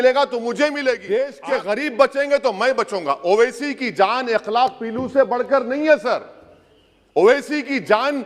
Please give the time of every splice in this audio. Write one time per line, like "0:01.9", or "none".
0:01.3